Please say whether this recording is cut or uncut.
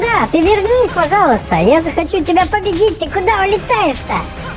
uncut